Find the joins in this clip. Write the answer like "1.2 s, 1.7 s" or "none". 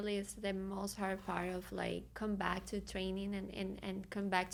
none